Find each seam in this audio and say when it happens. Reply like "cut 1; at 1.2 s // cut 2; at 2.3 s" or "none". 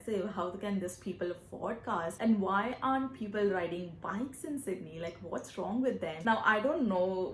none